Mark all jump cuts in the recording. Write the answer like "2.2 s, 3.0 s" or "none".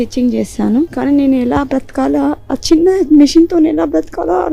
0.9 s